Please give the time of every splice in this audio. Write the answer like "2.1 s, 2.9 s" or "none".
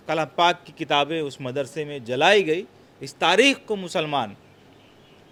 none